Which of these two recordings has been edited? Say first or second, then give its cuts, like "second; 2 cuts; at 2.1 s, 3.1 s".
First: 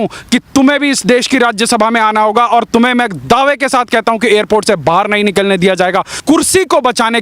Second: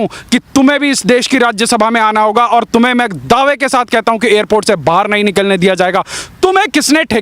first; 1 cut; at 6.2 s